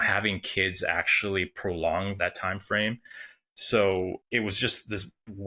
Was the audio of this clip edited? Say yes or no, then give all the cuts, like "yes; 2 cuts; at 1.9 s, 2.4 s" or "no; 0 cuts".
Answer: yes; 2 cuts; at 2.2 s, 4.2 s